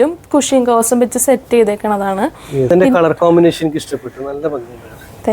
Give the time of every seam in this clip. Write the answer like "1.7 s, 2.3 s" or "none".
2.7 s